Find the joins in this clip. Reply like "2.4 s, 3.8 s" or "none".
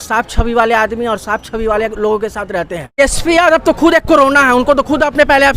3.0 s